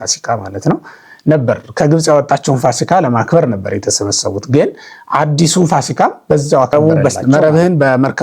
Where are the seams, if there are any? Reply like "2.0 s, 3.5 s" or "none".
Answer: 6.7 s